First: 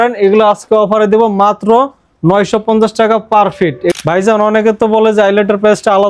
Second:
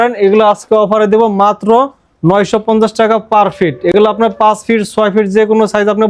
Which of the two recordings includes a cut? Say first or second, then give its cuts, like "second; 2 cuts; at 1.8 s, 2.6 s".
first; 1 cut; at 3.9 s